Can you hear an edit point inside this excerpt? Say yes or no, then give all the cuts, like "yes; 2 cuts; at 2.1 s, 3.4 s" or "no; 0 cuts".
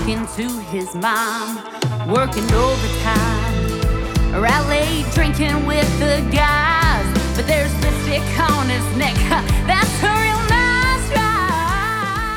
no; 0 cuts